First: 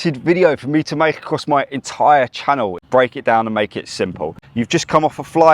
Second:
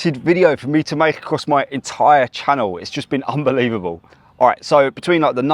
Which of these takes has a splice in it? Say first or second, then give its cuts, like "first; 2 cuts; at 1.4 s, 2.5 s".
first; 2 cuts; at 2.8 s, 4.5 s